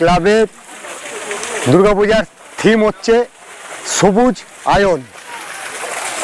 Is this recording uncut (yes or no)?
yes